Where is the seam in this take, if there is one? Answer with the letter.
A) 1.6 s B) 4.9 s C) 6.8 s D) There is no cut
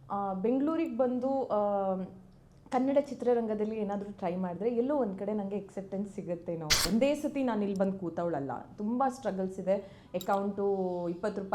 C